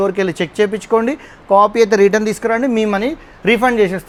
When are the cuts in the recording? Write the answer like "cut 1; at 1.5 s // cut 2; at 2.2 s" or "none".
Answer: none